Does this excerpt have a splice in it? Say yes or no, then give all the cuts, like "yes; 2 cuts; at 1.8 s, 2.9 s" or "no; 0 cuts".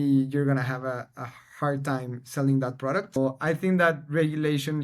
yes; 1 cut; at 3.2 s